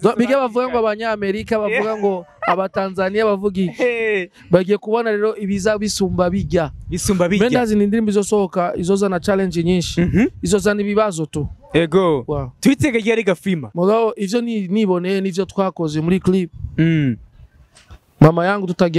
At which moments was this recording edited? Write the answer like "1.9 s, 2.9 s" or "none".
13.7 s